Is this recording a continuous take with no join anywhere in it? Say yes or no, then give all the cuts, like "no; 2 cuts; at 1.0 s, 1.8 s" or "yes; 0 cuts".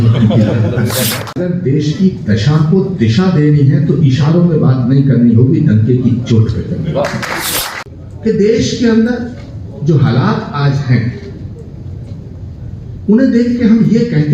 no; 2 cuts; at 1.4 s, 7.7 s